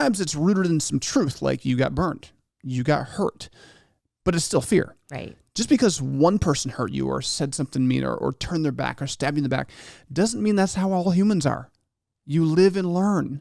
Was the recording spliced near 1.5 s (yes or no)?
no